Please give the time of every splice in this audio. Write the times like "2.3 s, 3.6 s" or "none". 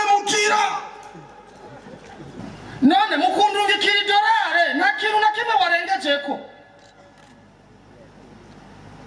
2.4 s